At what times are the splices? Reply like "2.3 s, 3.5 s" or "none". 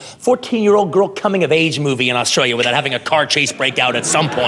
none